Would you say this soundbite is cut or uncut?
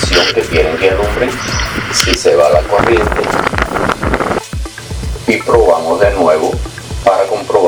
uncut